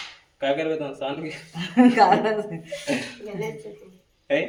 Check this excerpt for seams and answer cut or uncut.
uncut